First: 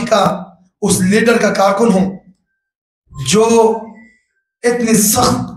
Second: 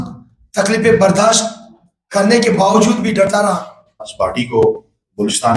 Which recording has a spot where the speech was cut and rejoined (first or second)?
second